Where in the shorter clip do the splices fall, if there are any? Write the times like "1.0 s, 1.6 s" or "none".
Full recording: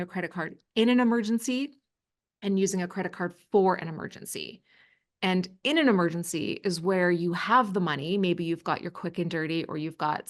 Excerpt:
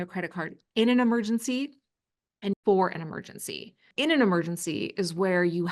2.5 s, 3.9 s